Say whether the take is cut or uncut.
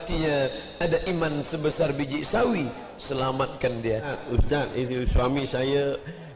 cut